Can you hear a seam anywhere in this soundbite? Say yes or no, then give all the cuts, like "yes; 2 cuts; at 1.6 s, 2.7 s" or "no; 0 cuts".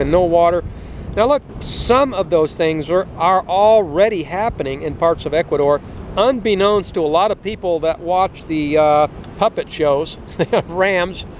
yes; 2 cuts; at 6.0 s, 9.2 s